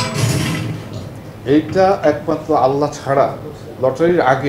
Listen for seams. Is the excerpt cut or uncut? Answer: uncut